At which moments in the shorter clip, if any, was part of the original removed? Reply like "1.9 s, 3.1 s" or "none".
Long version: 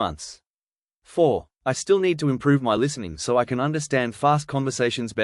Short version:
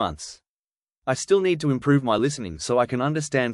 0.9 s